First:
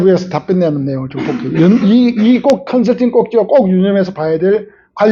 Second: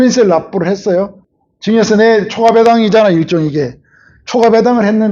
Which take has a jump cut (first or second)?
second